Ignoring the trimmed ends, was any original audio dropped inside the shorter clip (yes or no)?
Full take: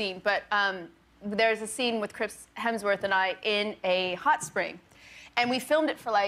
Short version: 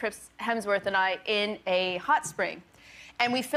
no